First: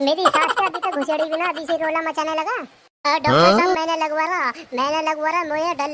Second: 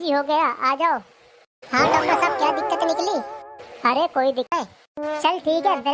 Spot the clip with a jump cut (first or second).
second